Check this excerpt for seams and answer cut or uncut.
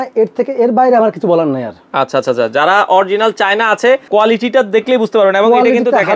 uncut